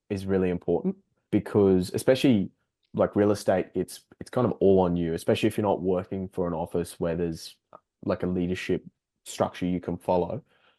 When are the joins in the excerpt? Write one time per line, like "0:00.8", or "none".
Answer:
0:01.1